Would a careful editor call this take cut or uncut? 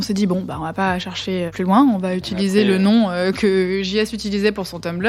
cut